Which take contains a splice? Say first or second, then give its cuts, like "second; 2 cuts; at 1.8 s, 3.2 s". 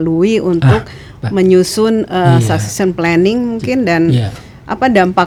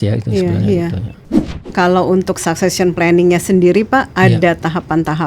second; 1 cut; at 1.2 s